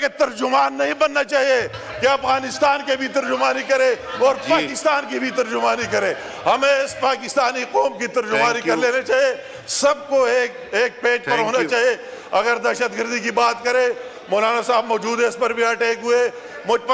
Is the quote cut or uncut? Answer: uncut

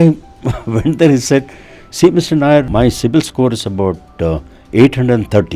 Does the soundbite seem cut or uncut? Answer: cut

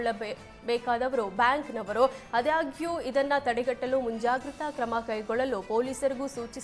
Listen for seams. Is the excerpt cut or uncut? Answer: uncut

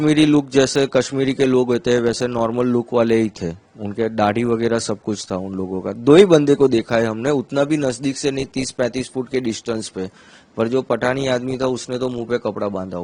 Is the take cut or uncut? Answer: uncut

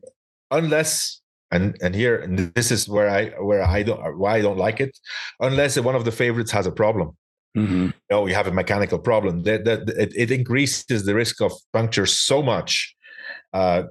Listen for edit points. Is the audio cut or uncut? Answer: uncut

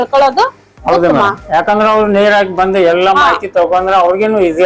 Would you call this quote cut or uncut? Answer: uncut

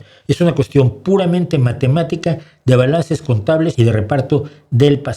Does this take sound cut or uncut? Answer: cut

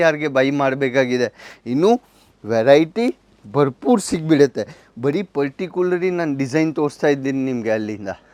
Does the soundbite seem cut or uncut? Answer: uncut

